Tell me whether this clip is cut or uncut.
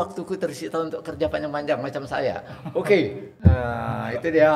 cut